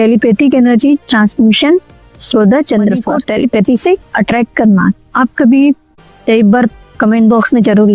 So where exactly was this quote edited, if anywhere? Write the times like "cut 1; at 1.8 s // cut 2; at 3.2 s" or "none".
cut 1; at 3.1 s // cut 2; at 5.9 s